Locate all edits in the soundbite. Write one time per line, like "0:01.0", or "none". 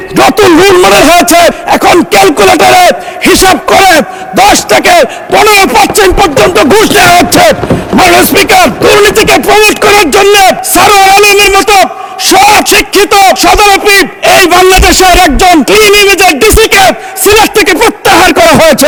none